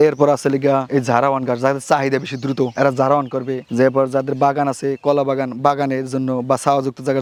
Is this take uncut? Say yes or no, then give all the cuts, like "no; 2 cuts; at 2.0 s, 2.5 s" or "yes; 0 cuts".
yes; 0 cuts